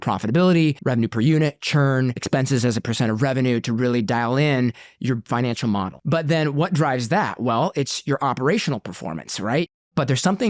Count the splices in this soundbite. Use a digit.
4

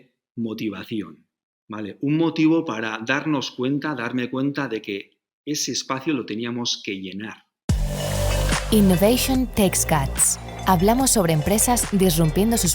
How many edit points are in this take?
1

